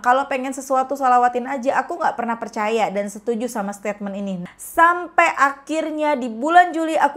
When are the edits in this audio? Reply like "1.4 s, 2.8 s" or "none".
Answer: 4.4 s